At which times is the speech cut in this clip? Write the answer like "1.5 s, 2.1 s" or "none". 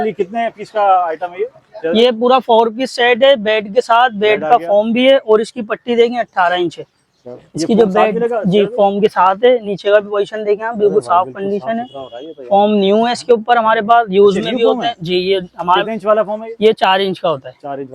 none